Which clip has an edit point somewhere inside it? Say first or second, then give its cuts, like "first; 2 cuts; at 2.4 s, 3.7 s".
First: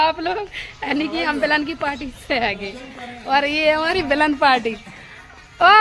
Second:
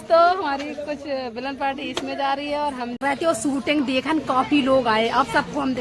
second; 1 cut; at 3.0 s